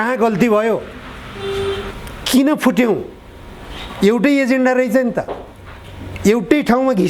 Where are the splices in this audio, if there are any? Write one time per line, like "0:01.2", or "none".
0:02.0